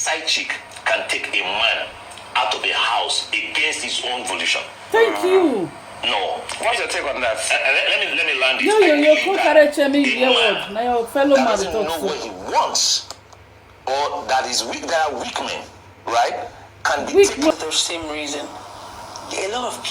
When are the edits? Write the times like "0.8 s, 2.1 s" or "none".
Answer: 17.5 s